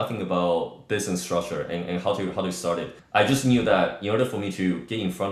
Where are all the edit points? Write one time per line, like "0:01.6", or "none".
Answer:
none